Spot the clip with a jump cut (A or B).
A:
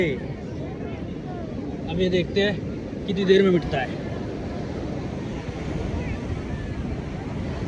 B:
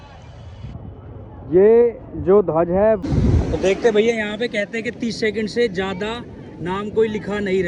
B